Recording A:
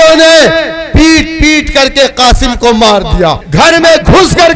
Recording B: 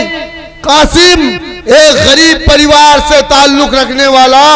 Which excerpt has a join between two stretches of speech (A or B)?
A